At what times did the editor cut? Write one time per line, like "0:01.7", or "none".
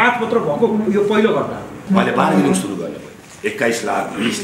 0:01.8